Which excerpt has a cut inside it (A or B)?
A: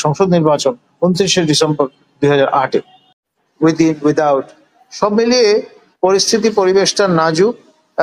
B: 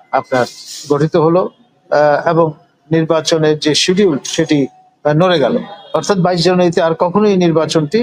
A